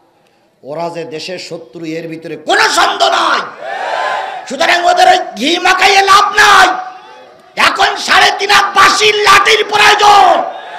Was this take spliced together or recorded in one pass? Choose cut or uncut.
uncut